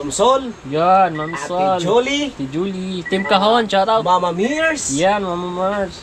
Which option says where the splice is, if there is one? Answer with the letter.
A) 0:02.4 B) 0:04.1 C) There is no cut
C